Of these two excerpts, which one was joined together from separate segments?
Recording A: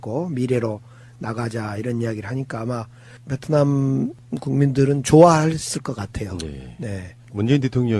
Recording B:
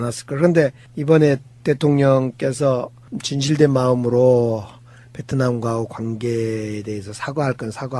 B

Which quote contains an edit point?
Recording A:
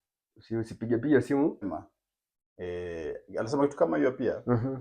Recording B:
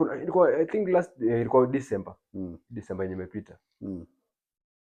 A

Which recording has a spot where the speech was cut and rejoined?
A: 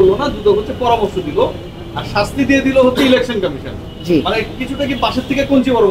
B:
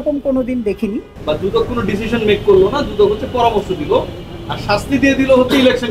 B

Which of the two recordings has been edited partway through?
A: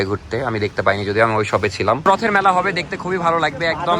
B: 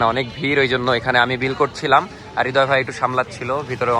A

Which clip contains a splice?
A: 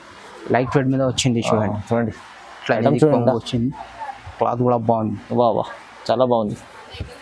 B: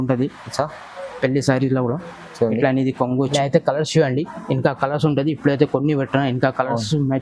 B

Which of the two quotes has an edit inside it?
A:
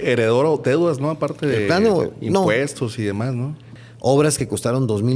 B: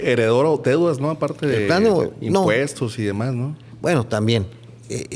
A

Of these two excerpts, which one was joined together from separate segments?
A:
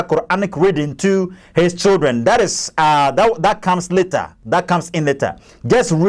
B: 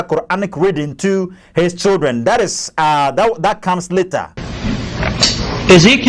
B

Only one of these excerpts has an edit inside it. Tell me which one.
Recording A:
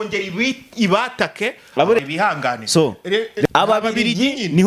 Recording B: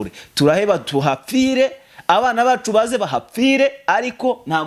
A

